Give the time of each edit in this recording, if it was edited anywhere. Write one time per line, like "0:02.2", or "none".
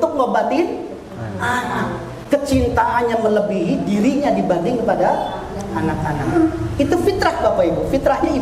none